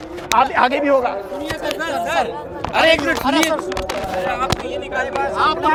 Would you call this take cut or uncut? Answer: uncut